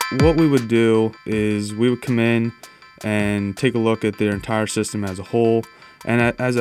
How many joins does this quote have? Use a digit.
1